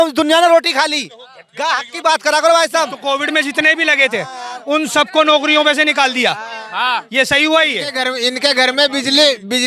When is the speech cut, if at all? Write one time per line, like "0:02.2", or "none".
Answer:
0:03.0
0:08.0